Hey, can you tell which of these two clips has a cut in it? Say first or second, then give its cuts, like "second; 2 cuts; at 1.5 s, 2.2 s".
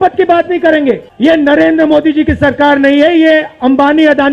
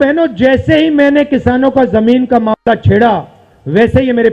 first; 1 cut; at 1.0 s